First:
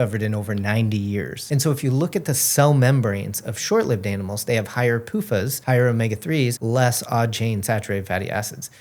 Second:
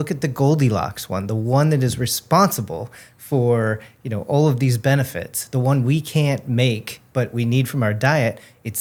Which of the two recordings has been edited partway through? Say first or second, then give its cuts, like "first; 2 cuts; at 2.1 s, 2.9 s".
first; 3 cuts; at 1.4 s, 5.6 s, 6.6 s